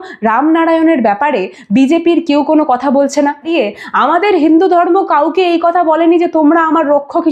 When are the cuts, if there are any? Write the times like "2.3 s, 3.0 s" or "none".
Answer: 3.5 s